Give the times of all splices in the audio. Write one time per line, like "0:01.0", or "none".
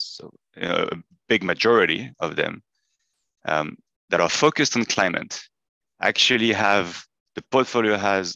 none